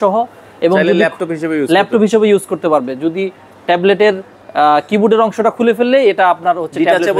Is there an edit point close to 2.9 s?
no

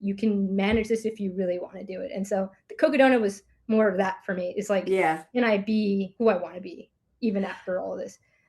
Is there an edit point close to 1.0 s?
no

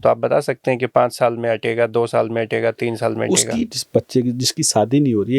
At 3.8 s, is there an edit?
yes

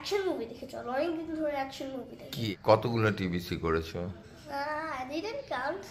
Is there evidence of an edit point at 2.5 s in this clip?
yes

